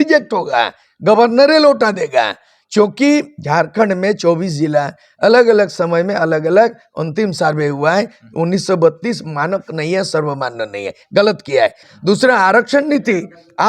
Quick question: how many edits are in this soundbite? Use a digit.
1